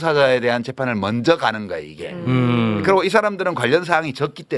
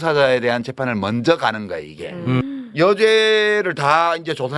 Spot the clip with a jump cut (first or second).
second